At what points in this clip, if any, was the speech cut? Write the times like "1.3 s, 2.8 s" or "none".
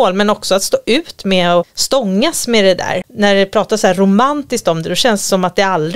1.8 s, 3.0 s